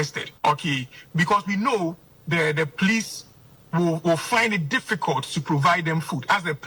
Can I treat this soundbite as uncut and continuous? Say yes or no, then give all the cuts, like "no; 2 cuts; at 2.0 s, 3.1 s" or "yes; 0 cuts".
yes; 0 cuts